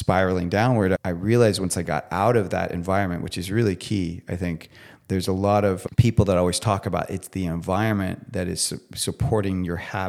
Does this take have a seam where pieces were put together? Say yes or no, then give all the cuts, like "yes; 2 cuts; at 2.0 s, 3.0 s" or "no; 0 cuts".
yes; 2 cuts; at 1.0 s, 5.8 s